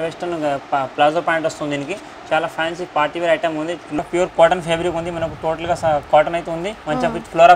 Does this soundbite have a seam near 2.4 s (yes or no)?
no